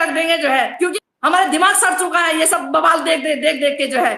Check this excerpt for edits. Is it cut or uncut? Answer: cut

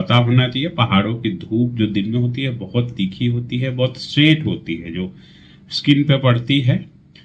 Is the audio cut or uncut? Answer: uncut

